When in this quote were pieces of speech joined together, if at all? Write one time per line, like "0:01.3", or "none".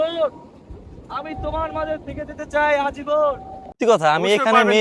0:03.8